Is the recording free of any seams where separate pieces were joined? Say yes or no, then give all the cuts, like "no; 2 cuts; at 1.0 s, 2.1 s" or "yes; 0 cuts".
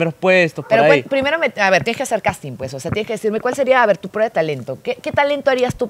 yes; 0 cuts